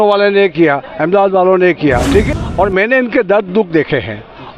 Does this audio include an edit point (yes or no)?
yes